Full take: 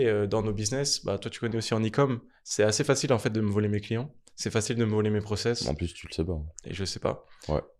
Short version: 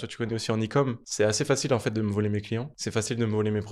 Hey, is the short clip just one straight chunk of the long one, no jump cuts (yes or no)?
no